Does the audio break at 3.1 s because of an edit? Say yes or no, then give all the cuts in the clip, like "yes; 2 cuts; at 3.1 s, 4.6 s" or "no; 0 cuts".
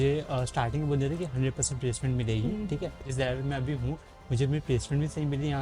yes; 1 cut; at 3.1 s